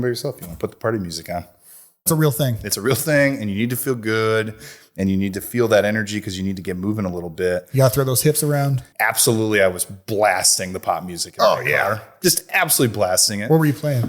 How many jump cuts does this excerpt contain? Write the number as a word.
two